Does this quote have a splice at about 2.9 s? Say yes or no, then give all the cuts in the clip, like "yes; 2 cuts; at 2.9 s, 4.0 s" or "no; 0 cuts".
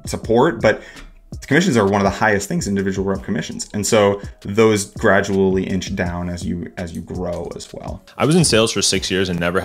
no; 1 cut; at 8.0 s